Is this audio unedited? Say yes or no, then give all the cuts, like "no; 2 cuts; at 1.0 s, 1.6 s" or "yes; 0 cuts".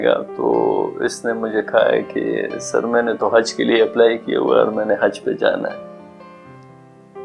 yes; 0 cuts